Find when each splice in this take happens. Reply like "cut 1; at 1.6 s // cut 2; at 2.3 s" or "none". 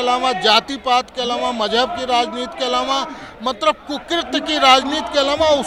none